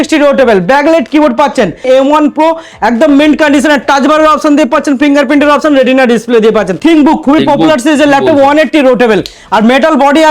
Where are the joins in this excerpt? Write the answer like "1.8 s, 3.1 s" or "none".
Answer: 1.8 s, 6.8 s